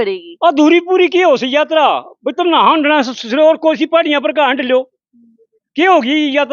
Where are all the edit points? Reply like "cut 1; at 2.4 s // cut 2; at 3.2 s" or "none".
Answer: none